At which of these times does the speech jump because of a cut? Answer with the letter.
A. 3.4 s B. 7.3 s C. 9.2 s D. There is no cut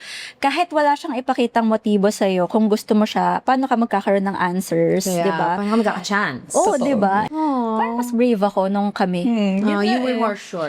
B